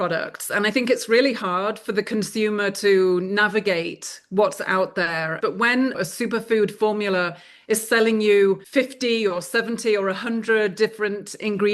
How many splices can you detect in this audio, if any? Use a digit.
1